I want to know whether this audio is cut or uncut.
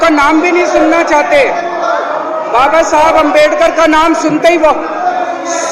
uncut